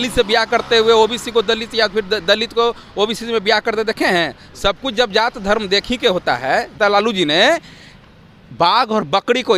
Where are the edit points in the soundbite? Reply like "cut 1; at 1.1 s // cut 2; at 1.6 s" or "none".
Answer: cut 1; at 6.7 s